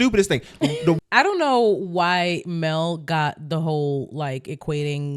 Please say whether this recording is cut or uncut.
cut